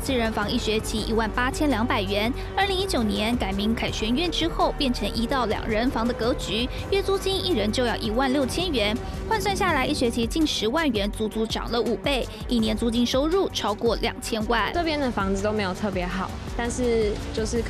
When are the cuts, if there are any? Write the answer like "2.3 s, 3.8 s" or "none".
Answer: 14.7 s